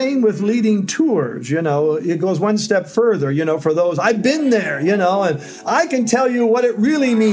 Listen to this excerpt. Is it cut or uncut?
uncut